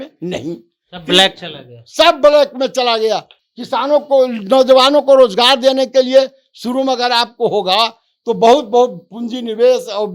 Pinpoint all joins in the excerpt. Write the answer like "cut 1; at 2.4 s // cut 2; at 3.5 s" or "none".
none